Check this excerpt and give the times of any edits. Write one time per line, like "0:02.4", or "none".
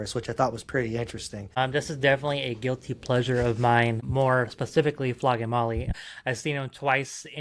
0:01.6
0:04.0
0:05.9